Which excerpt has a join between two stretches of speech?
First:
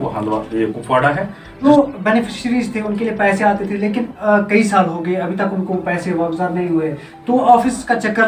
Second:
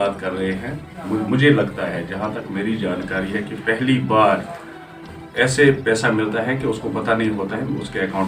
first; 1 cut; at 1.4 s

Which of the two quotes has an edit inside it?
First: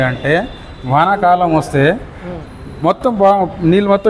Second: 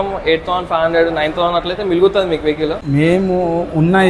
second; 1 cut; at 2.8 s

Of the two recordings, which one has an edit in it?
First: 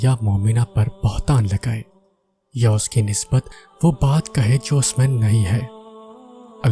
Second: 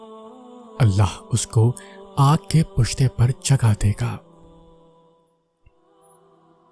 second; 1 cut; at 4.2 s

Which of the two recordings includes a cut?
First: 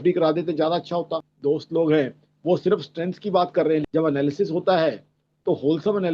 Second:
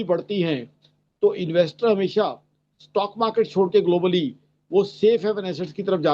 first; 2 cuts; at 1.3 s, 3.9 s

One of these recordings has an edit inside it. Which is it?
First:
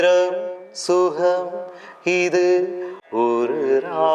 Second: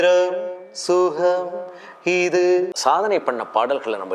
second; 1 cut; at 2.7 s

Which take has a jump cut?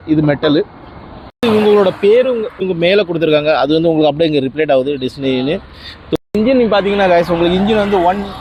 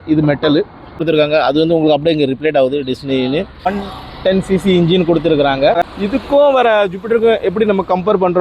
second; 3 cuts; at 1.0 s, 3.7 s, 5.9 s

